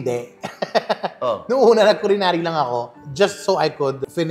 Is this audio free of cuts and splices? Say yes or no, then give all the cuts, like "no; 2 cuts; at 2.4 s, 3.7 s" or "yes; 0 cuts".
yes; 0 cuts